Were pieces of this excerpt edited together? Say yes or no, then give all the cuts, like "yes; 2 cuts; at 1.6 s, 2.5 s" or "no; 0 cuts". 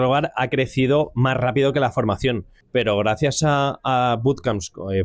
yes; 1 cut; at 2.5 s